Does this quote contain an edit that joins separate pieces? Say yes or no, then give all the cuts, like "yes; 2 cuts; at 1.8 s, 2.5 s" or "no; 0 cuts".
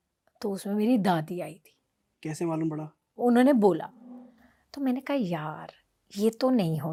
no; 0 cuts